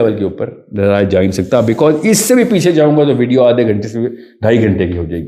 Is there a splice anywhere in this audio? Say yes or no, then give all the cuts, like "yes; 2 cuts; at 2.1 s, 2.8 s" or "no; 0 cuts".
no; 0 cuts